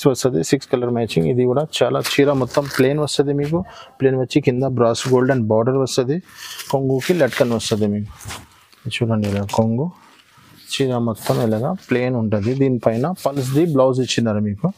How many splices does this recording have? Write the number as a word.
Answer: zero